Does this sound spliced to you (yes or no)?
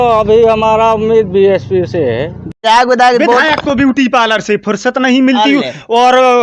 yes